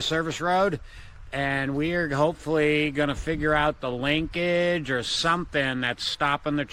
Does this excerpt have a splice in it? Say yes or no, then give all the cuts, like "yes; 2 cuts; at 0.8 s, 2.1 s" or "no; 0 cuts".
no; 0 cuts